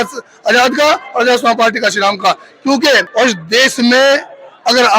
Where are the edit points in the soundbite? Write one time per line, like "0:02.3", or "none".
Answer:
0:03.1